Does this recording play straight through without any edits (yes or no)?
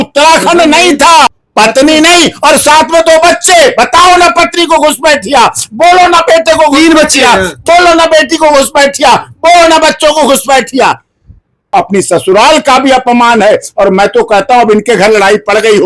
no